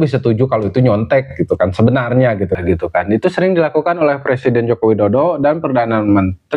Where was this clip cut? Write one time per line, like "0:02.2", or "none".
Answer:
0:02.5

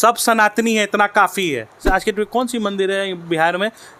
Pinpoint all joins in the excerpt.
0:01.9

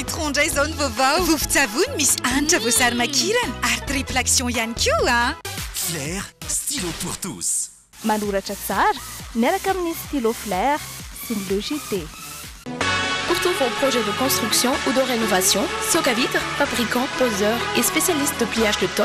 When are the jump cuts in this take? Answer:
none

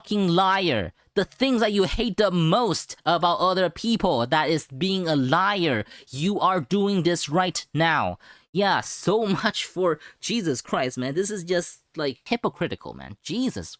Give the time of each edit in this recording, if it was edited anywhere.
0:12.2

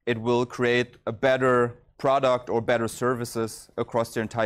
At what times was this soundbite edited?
0:01.8

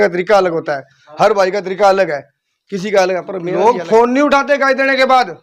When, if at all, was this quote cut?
0:03.5

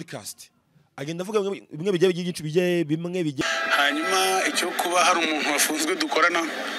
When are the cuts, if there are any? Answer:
0:03.4

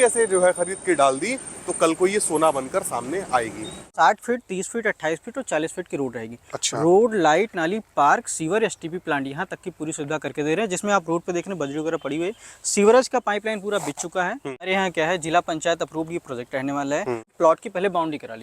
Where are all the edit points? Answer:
0:03.9
0:14.7
0:17.3

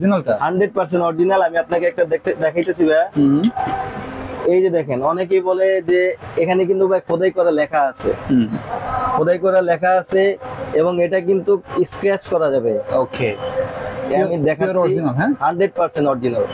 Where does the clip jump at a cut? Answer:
none

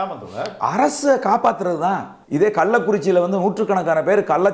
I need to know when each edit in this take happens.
0:02.1

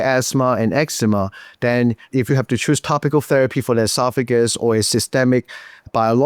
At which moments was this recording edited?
0:02.2

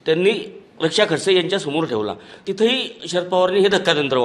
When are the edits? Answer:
0:02.3

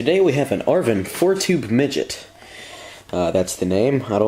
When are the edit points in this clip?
0:01.8

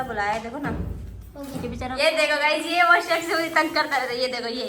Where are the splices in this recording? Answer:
0:02.0

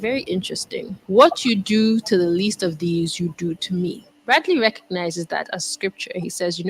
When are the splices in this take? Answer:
0:05.6

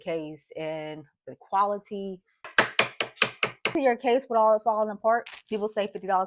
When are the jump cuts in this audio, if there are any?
0:02.5
0:03.7
0:05.3

